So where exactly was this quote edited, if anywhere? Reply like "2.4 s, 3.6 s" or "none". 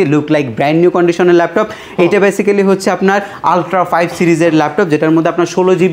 none